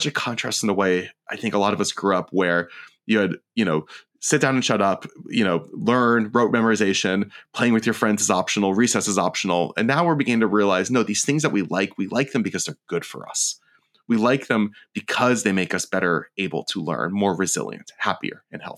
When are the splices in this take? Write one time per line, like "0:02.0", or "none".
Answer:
none

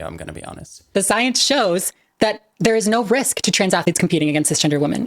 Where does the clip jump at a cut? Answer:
0:00.9
0:03.8

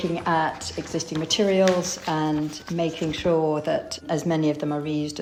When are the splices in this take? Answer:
none

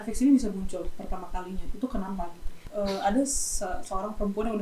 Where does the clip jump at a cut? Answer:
0:02.6

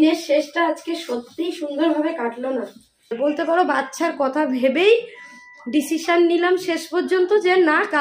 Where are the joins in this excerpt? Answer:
0:03.2

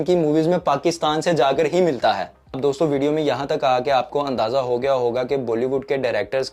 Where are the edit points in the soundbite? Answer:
none

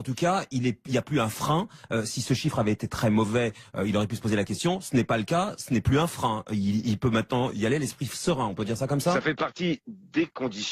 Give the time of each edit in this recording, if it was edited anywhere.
0:05.6

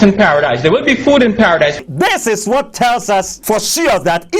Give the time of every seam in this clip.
0:03.3

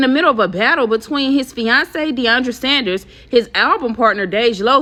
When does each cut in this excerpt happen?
none

